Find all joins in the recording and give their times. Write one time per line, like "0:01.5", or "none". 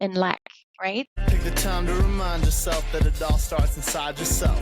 0:01.1